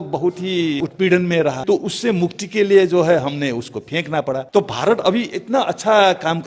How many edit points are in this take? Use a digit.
3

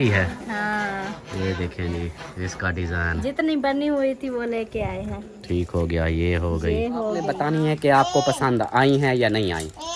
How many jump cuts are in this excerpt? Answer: 1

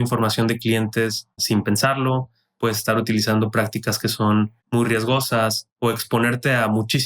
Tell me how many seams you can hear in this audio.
3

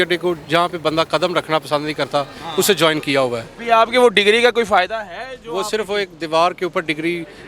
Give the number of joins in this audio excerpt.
1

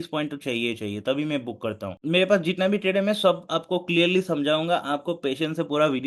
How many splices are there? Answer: 1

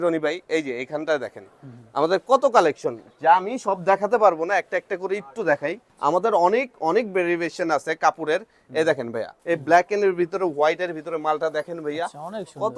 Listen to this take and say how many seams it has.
2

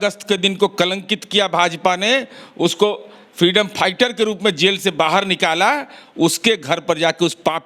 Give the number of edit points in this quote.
0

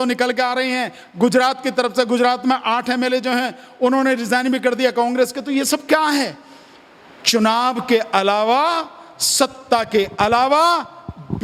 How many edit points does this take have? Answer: 0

